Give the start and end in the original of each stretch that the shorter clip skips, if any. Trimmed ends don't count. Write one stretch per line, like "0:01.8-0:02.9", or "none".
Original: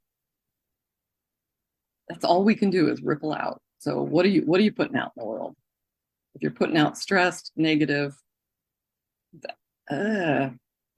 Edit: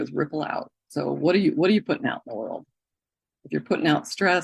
none